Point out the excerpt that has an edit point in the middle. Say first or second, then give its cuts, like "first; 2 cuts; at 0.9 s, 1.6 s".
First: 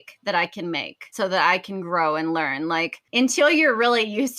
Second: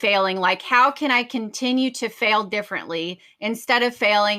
first; 2 cuts; at 1.1 s, 3.0 s